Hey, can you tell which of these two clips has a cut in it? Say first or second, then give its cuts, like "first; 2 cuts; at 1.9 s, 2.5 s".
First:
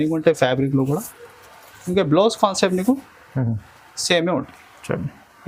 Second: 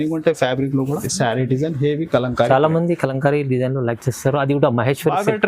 second; 1 cut; at 1.1 s